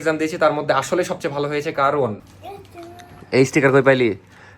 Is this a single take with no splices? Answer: no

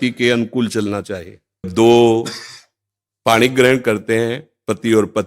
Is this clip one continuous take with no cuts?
no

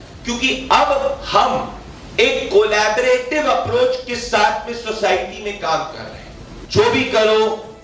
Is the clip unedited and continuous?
no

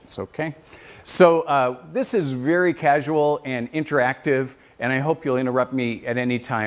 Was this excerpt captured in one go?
no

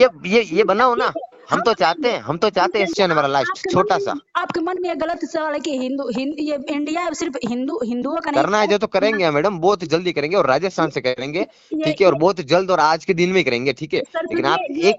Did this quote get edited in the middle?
yes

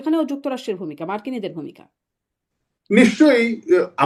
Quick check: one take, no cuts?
yes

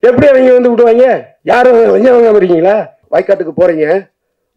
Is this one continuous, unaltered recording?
no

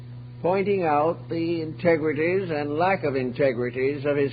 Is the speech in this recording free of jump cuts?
no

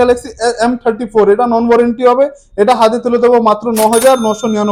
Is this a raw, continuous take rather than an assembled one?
yes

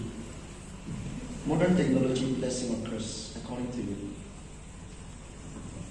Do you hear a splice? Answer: yes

